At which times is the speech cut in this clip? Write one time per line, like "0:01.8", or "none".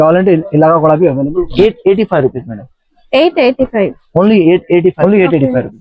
0:01.5
0:05.0